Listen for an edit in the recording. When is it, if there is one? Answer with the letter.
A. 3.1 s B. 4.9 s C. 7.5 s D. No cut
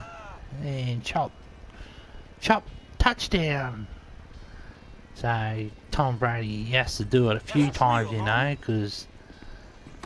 D